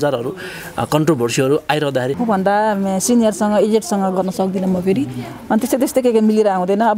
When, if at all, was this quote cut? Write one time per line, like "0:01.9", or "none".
0:02.2

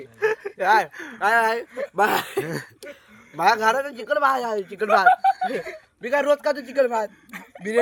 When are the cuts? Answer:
none

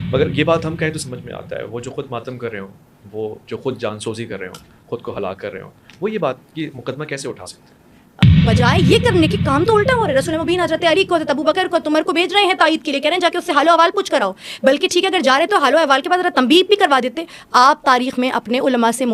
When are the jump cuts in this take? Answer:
0:08.3

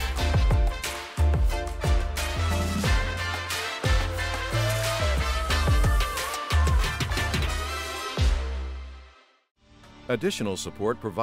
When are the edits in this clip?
0:09.9

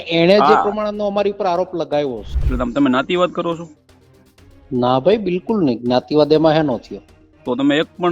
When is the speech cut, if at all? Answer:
0:02.3

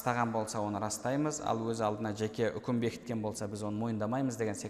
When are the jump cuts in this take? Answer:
none

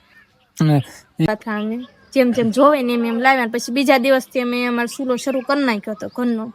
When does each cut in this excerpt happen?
0:01.3

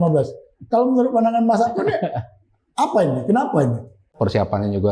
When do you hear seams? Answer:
0:04.0

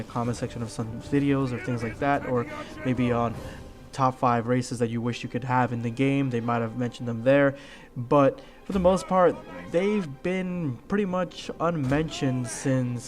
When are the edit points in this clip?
0:06.1

